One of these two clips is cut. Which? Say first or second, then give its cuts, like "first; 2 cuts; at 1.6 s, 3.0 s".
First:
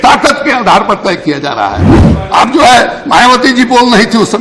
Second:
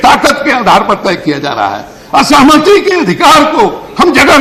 first; 1 cut; at 1.9 s